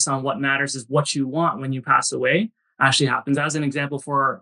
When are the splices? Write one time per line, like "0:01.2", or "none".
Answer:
none